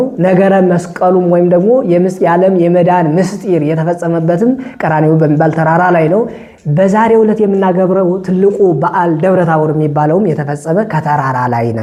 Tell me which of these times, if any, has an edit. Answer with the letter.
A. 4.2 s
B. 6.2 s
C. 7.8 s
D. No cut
D